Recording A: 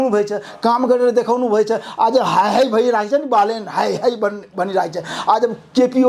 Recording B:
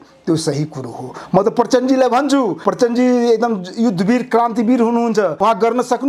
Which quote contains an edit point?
B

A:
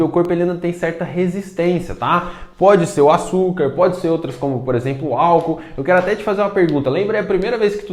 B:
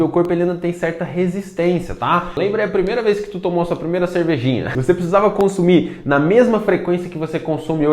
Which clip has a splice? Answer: B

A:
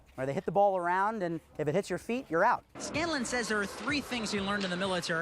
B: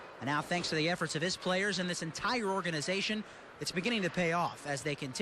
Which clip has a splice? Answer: A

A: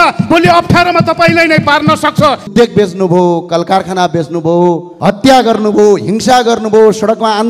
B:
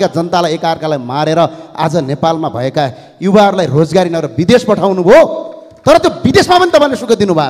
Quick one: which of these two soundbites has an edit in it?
A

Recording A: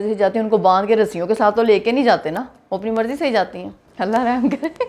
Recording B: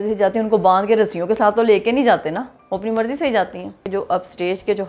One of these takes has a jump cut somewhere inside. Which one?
B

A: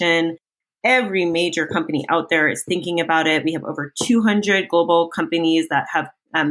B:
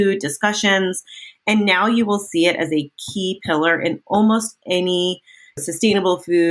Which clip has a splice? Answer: B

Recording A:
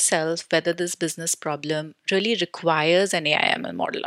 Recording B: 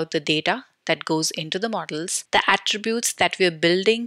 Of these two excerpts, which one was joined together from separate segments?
B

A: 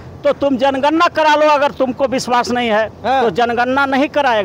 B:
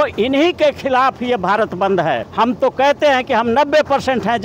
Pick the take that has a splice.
B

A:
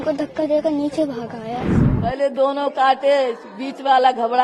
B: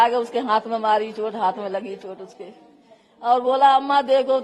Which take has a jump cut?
A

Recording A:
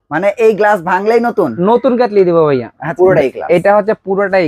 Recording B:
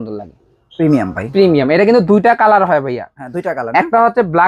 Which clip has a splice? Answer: A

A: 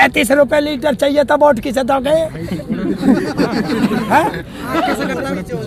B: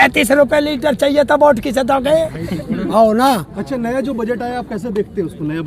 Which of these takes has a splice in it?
B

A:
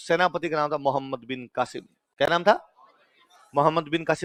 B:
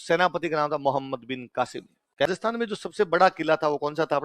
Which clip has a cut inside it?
B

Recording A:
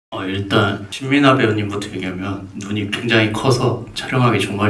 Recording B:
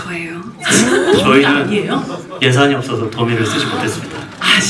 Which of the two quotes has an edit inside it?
A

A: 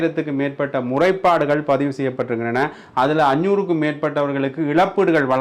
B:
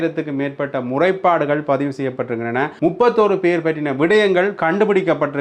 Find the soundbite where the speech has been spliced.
B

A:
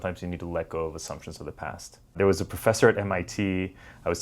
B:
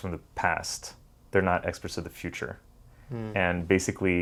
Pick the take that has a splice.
A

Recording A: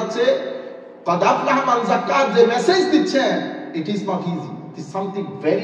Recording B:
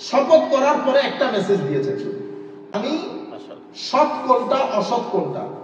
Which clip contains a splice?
B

